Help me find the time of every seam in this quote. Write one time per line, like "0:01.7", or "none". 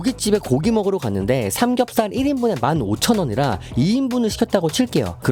none